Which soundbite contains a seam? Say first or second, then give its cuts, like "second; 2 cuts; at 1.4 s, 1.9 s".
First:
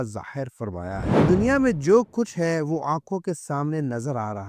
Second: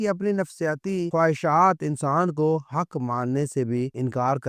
first; 1 cut; at 1.2 s